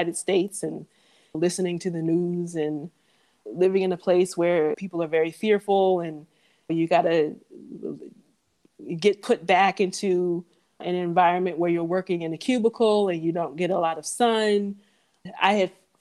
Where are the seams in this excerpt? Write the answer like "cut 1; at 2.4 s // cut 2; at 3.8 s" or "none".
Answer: none